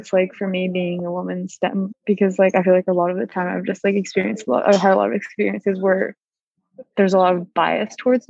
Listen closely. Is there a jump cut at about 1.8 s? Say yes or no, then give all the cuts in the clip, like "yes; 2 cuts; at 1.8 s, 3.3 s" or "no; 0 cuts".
yes; 1 cut; at 1.8 s